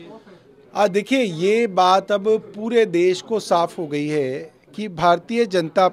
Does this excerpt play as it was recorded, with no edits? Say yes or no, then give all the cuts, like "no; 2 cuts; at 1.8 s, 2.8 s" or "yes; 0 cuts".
yes; 0 cuts